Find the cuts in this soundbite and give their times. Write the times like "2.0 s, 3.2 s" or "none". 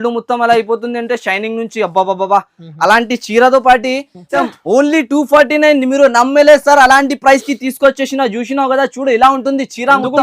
4.1 s